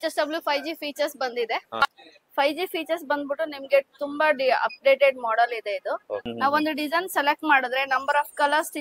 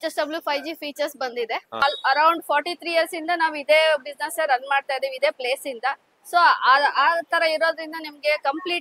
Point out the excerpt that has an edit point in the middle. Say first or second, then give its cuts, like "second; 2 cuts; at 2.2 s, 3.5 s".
first; 2 cuts; at 1.8 s, 6.2 s